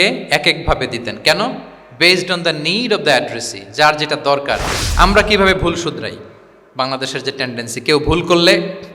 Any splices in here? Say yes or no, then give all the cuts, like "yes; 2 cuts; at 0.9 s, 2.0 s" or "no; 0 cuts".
yes; 1 cut; at 4.8 s